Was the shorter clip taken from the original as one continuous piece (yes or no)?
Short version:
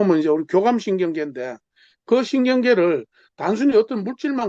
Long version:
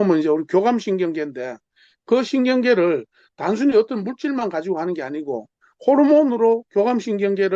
yes